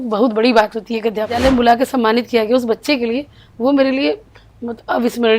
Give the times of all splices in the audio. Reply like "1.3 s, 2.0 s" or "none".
1.3 s